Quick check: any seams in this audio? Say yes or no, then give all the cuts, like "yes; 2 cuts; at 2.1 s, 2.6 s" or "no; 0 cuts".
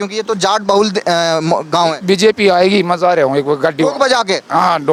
no; 0 cuts